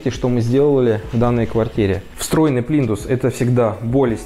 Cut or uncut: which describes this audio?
cut